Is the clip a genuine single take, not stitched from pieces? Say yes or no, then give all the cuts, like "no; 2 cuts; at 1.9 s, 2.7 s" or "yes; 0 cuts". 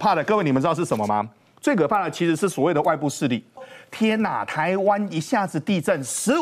no; 1 cut; at 3.8 s